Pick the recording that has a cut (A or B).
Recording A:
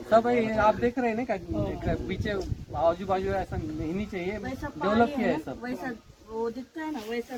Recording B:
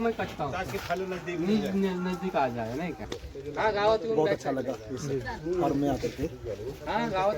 B